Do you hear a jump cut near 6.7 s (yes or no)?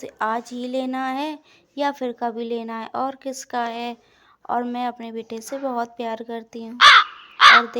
yes